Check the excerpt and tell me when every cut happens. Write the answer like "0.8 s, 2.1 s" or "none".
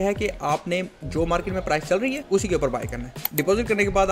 2.2 s, 3.2 s